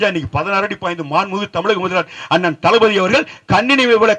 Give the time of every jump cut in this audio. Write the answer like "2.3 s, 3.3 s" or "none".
none